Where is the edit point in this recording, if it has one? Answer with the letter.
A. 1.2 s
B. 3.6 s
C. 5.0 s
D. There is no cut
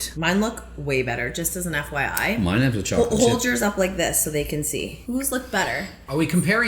C